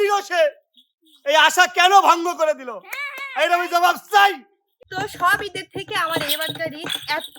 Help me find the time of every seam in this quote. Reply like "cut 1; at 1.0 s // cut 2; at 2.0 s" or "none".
cut 1; at 4.8 s